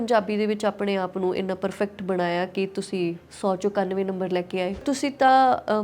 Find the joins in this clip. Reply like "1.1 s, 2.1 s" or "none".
4.8 s